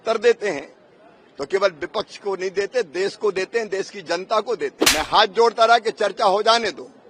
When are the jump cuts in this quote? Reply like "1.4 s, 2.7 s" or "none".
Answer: 4.8 s